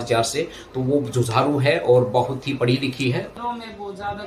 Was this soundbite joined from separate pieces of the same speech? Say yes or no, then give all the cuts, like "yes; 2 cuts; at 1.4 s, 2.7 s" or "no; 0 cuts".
yes; 1 cut; at 3.3 s